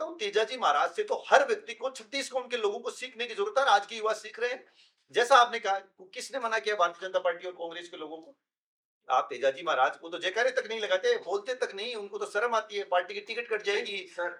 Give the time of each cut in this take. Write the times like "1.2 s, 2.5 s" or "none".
none